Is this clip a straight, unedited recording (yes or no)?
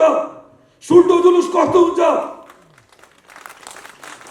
yes